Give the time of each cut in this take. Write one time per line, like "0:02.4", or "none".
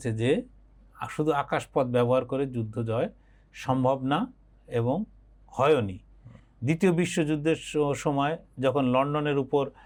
none